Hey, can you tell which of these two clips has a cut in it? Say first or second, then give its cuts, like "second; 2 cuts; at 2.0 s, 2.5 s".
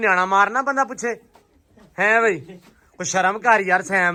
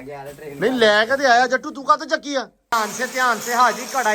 second; 1 cut; at 2.7 s